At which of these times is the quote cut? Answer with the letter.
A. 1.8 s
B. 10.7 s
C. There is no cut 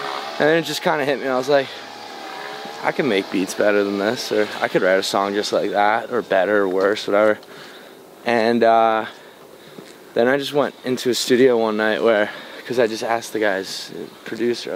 C